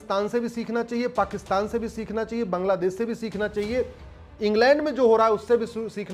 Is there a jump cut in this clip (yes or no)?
no